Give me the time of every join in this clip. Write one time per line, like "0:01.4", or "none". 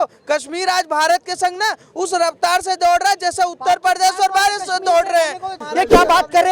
0:05.6